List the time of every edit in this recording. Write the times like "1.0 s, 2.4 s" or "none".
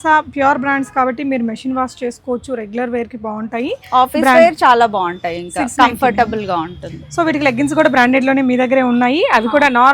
none